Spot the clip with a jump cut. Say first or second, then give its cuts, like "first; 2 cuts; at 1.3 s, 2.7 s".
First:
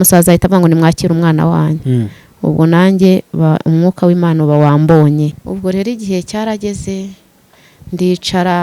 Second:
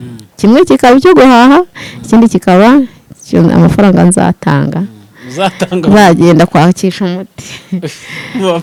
first; 1 cut; at 5.4 s